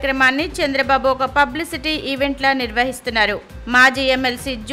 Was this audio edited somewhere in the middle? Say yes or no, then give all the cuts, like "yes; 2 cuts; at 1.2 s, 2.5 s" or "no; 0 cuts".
no; 0 cuts